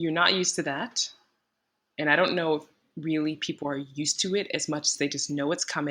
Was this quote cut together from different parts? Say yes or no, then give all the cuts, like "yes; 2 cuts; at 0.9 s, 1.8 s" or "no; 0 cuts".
no; 0 cuts